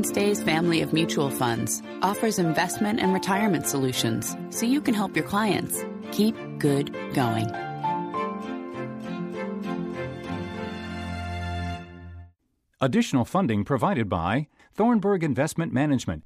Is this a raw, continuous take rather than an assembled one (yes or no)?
yes